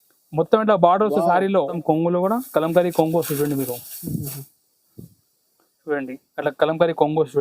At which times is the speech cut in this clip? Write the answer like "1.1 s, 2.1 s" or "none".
1.8 s

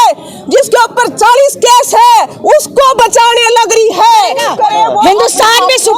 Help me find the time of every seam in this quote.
4.4 s

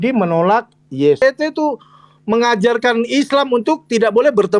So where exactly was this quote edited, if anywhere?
1.2 s

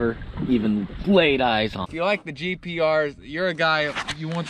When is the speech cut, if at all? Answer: 1.9 s

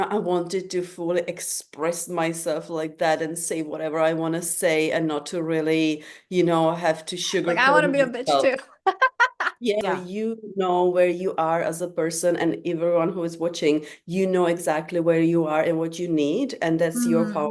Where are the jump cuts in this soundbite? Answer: 9.8 s

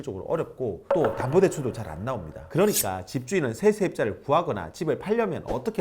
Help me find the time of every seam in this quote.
2.3 s

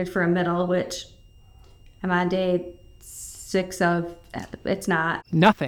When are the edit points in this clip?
none

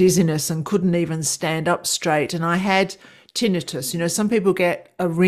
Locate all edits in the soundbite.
none

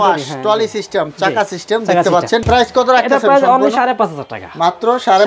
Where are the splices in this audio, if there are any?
2.4 s

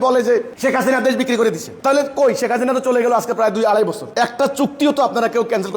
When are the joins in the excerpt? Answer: 4.0 s

